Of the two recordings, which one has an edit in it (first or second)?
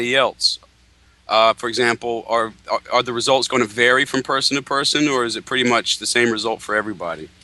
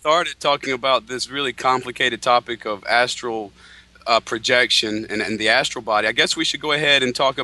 first